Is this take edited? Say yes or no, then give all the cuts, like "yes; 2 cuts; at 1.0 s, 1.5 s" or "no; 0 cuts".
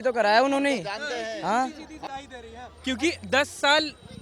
yes; 1 cut; at 2.0 s